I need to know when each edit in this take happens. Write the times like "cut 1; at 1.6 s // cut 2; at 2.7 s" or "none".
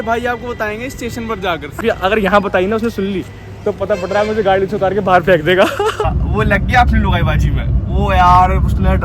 cut 1; at 1.7 s // cut 2; at 6.1 s